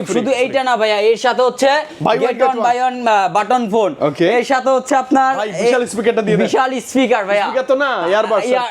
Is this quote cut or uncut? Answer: uncut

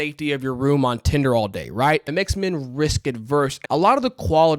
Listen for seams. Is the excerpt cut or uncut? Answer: cut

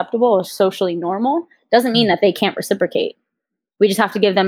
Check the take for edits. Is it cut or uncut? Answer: uncut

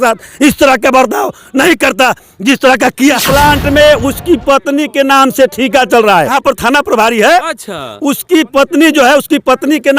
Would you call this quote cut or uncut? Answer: cut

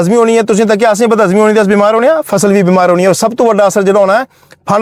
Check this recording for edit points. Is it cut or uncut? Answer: uncut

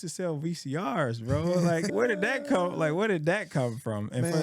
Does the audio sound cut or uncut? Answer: cut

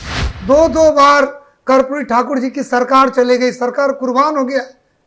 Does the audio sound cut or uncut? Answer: uncut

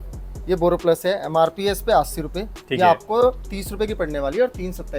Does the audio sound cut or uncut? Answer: uncut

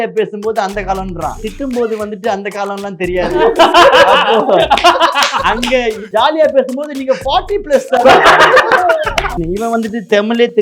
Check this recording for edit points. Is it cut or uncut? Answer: cut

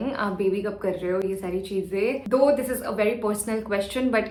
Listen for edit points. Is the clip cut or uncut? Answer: uncut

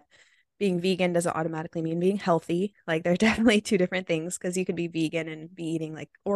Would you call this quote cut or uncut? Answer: uncut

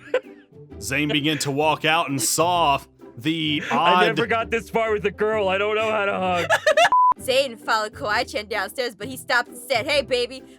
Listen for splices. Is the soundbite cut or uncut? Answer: cut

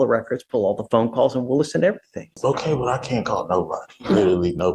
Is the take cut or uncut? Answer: cut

